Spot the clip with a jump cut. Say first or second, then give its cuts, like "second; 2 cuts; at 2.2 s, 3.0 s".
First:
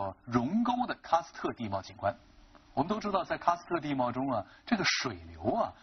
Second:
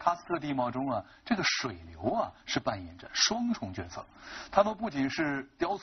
second; 1 cut; at 4.2 s